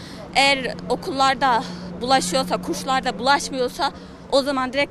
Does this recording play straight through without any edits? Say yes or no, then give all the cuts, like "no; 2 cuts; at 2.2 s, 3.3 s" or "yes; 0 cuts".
yes; 0 cuts